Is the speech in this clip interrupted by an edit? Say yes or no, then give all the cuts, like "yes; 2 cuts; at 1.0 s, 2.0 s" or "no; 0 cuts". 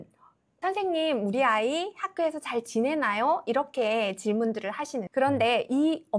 no; 0 cuts